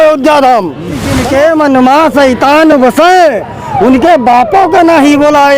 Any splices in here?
yes; 1 cut; at 1.2 s

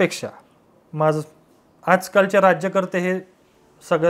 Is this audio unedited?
yes; 0 cuts

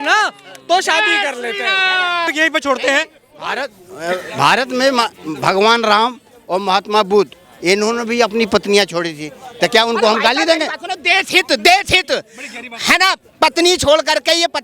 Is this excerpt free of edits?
no; 1 cut; at 2.3 s

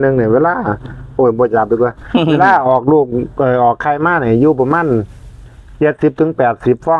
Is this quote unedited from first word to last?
yes; 0 cuts

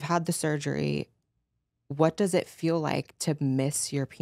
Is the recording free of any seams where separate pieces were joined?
yes; 0 cuts

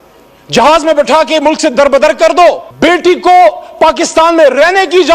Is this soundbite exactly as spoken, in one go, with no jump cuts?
no; 1 cut; at 2.7 s

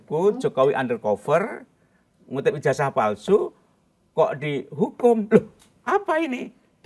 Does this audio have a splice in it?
no; 0 cuts

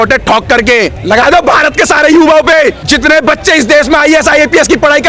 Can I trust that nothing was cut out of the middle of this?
no; 2 cuts; at 1.0 s, 2.8 s

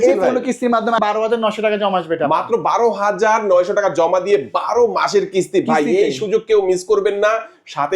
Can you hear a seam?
yes; 1 cut; at 1.0 s

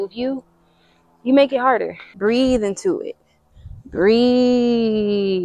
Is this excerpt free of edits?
no; 1 cut; at 2.0 s

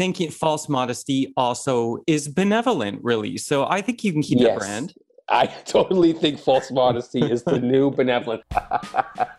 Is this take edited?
yes; 1 cut; at 8.5 s

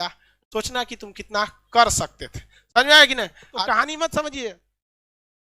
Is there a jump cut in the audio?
yes; 1 cut; at 3.4 s

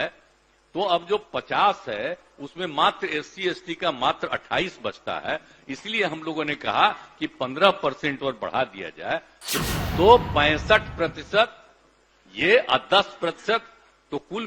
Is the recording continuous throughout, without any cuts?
no; 1 cut; at 9.4 s

